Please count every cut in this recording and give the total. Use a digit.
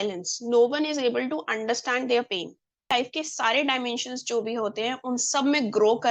1